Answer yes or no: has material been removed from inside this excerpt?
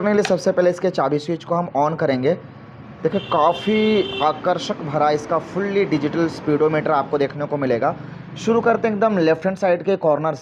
no